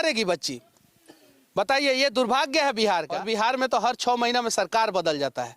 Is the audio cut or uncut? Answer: cut